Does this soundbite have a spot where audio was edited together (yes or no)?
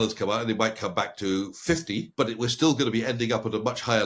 yes